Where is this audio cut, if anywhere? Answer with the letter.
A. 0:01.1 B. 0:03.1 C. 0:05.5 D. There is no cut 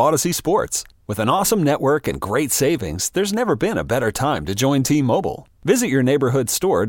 D